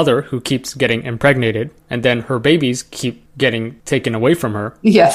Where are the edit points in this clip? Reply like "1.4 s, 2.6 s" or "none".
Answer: none